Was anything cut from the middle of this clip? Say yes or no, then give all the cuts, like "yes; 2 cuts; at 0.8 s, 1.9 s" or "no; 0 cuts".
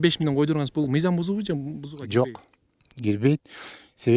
no; 0 cuts